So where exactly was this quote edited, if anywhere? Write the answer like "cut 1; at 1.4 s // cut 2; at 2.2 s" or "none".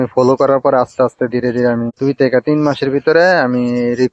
cut 1; at 1.9 s